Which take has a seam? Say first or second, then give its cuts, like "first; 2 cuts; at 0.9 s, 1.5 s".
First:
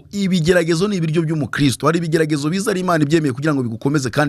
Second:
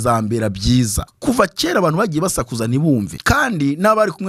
second; 2 cuts; at 1.1 s, 3.1 s